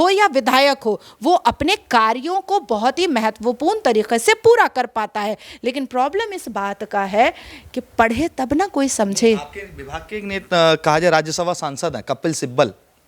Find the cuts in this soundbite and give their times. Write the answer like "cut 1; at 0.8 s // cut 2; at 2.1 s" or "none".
none